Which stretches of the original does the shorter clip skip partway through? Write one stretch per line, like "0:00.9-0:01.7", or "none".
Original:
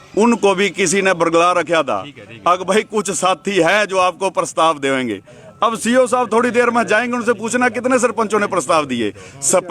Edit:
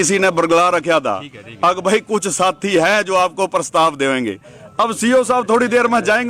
none